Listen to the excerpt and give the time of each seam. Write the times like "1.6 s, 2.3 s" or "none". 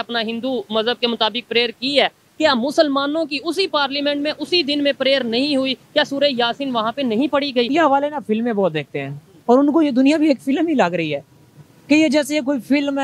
7.7 s